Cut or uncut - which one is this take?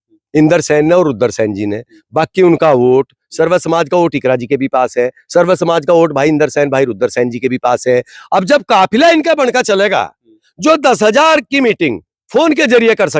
uncut